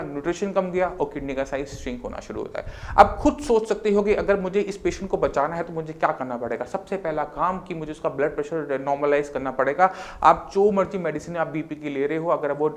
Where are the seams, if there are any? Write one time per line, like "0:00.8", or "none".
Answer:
none